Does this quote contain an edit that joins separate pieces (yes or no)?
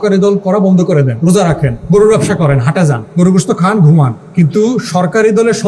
yes